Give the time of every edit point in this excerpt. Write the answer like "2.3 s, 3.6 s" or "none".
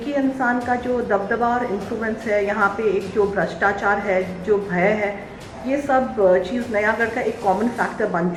none